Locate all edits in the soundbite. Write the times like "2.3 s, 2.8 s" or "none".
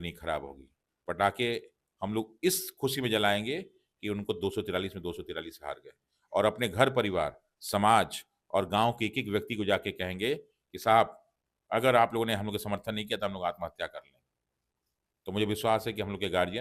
none